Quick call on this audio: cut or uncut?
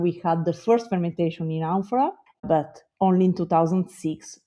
cut